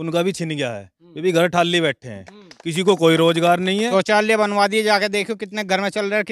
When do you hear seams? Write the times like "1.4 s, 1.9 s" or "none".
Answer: 3.9 s